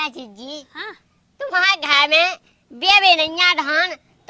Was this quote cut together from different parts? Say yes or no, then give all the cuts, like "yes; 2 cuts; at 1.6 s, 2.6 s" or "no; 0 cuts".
no; 0 cuts